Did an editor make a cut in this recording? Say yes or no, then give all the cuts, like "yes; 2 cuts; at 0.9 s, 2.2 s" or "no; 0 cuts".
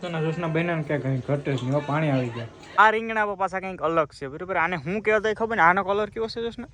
yes; 1 cut; at 2.7 s